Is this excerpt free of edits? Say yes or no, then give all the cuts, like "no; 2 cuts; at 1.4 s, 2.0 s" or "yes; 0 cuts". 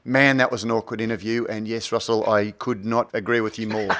no; 1 cut; at 3.1 s